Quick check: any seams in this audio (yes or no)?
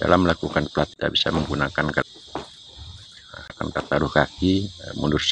yes